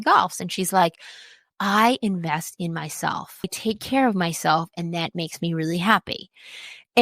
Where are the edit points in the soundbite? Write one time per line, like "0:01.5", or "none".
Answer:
0:03.5

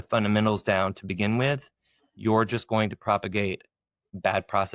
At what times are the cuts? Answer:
none

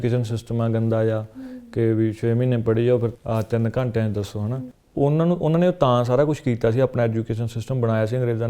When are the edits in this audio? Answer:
0:03.1
0:04.5

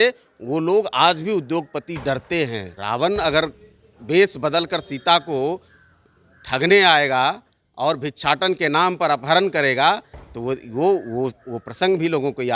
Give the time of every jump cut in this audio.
0:02.7

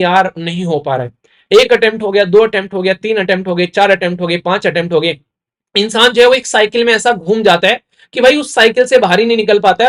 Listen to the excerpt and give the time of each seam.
none

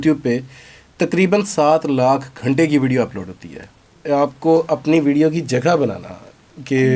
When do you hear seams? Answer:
0:03.9

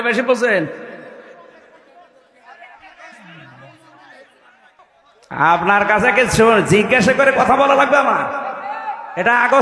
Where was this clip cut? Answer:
0:04.8

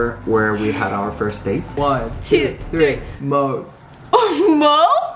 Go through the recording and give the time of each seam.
0:01.7

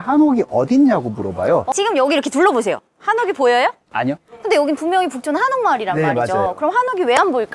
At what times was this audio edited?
0:01.7
0:04.3

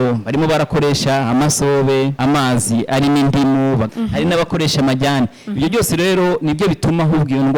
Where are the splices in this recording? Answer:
0:02.1
0:03.9

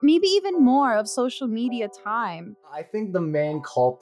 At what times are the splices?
0:03.0

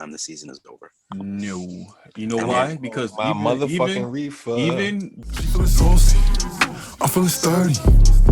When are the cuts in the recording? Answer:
0:05.1

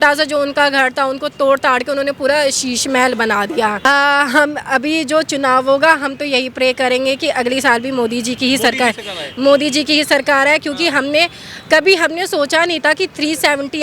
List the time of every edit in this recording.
0:03.8

